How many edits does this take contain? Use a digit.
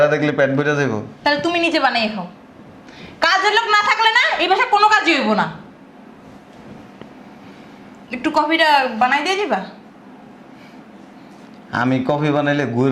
0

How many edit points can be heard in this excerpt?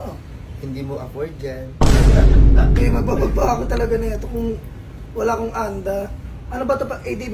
0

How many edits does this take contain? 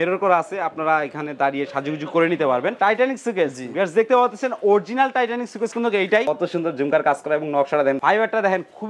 3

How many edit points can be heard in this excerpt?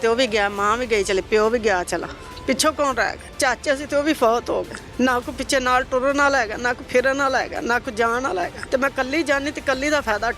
3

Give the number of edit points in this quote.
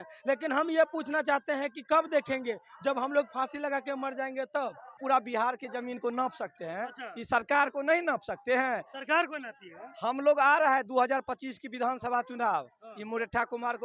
1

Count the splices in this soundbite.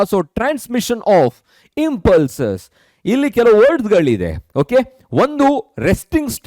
0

